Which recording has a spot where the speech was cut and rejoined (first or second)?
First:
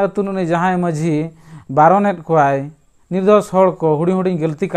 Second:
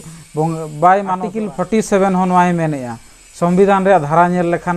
second